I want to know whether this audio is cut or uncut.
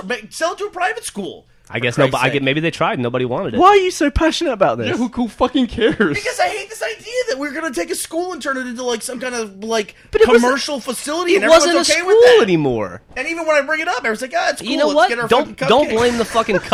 uncut